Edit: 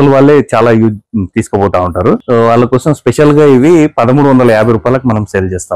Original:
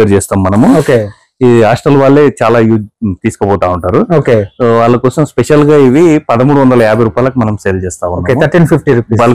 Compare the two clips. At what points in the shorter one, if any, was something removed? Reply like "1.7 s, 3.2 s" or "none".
2.2 s